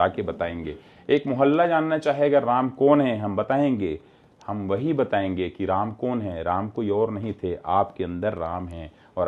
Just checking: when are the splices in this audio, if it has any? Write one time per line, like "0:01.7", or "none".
none